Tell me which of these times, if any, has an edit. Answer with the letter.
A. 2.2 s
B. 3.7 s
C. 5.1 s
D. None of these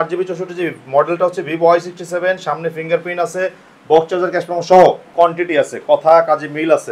C